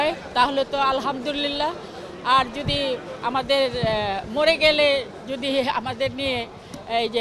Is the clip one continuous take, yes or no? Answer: yes